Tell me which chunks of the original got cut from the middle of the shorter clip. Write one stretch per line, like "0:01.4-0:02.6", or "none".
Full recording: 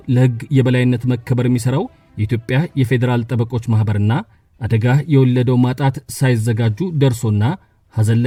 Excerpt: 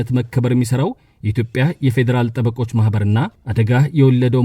0:04.4-0:04.6